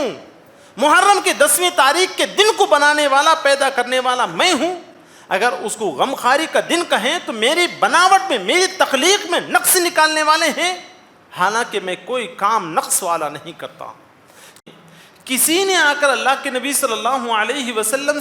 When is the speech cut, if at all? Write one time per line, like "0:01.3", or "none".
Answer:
0:14.6